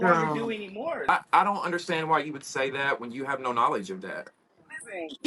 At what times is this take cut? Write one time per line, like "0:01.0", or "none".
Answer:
0:01.1